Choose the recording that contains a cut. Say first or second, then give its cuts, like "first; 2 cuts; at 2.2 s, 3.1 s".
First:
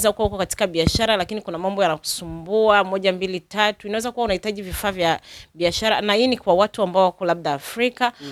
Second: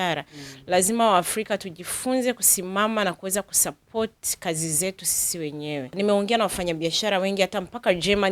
second; 1 cut; at 5.9 s